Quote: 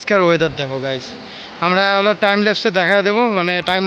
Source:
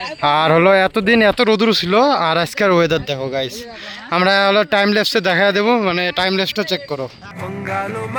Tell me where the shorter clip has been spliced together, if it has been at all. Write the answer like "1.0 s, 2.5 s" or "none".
none